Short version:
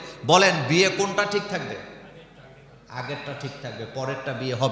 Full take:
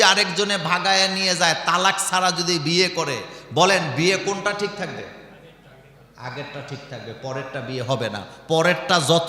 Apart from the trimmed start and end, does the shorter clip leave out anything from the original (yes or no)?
no